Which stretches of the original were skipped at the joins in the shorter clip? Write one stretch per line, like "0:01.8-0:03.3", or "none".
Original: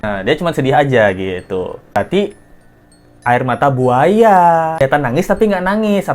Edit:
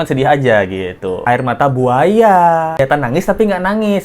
0:01.7-0:03.2